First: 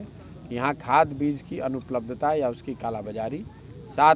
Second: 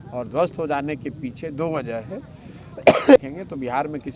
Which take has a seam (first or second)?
second